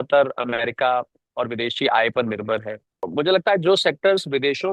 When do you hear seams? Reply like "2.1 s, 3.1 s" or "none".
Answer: 3.1 s